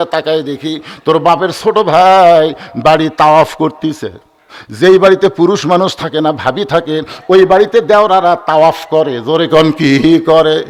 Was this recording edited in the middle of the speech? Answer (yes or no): no